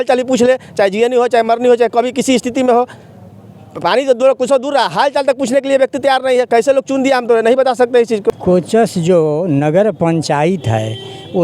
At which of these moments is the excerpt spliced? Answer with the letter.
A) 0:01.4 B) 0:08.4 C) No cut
B